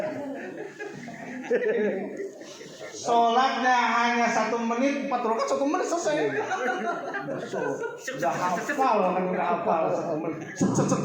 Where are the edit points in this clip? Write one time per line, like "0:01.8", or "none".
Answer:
none

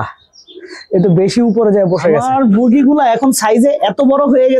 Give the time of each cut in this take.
0:02.2

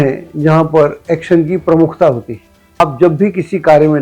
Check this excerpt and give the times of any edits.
0:02.8

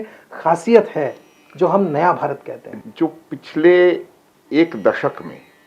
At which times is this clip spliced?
0:02.7

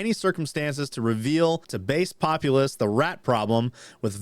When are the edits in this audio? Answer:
0:01.7

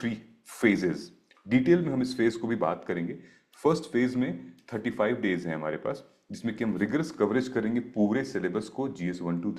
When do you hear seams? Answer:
none

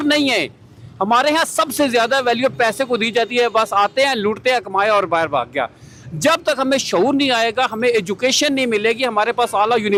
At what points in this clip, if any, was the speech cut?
none

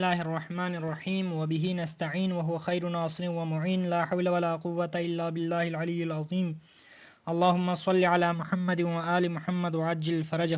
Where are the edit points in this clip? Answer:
0:07.9

